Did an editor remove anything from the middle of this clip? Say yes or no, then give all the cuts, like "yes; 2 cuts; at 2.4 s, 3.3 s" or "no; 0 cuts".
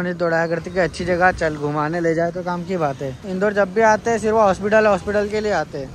yes; 1 cut; at 3.2 s